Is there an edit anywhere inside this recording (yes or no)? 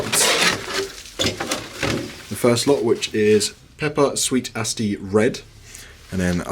no